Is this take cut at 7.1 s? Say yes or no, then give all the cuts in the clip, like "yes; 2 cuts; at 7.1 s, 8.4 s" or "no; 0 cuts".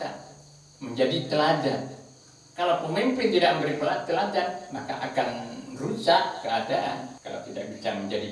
yes; 1 cut; at 7.1 s